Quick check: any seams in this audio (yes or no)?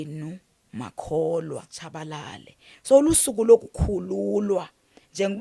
yes